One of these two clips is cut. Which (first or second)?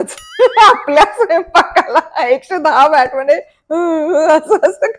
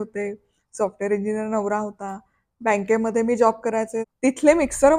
second